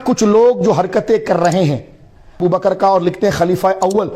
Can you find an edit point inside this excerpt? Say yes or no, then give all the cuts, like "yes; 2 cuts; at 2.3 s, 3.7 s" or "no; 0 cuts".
yes; 1 cut; at 2.4 s